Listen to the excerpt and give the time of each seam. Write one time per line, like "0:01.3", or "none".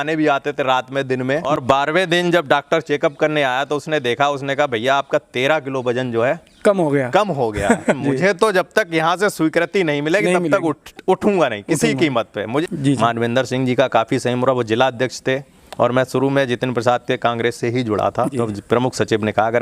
0:01.5
0:08.0
0:12.6
0:18.4